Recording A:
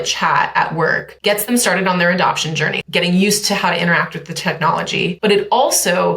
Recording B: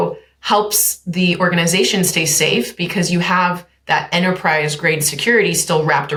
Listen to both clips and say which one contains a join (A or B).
A